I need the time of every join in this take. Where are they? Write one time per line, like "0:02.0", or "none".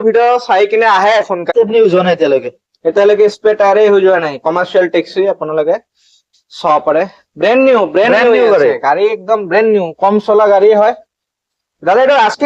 0:01.4